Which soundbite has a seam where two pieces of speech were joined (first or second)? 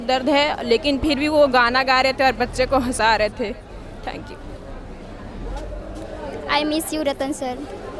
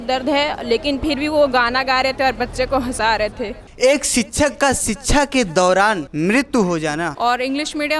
second